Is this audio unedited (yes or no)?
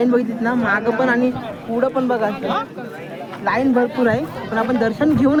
yes